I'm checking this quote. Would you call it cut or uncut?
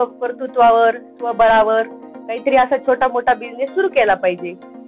uncut